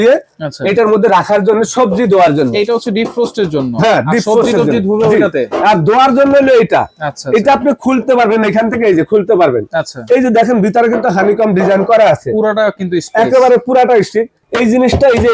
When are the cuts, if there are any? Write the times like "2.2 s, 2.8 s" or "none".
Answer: 14.4 s